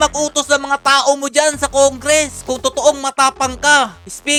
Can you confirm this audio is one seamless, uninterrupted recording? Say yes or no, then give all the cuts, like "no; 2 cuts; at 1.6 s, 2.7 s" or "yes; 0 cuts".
yes; 0 cuts